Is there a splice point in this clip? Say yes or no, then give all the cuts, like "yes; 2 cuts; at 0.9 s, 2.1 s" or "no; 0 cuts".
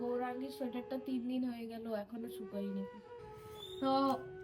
yes; 1 cut; at 3.1 s